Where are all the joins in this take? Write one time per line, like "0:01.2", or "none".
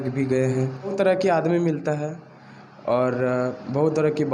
0:00.9